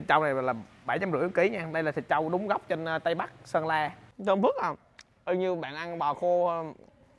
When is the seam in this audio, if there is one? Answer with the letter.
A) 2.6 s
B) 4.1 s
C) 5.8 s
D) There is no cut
B